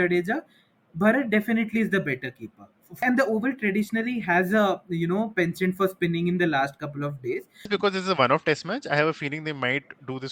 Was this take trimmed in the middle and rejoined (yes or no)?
yes